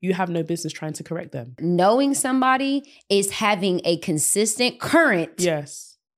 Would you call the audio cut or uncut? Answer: cut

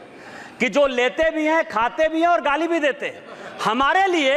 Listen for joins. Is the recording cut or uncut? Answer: uncut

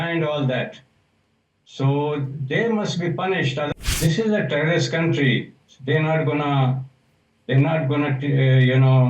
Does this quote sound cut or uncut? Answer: cut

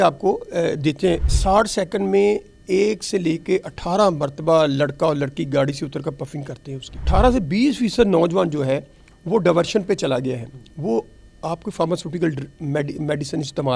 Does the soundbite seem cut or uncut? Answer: cut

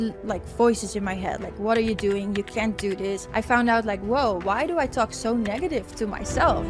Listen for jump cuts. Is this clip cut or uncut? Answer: cut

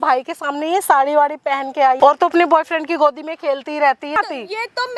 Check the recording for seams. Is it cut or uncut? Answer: cut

